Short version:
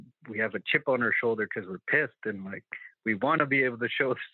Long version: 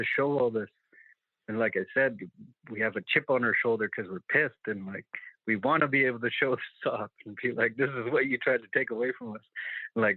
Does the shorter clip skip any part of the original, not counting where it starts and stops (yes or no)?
no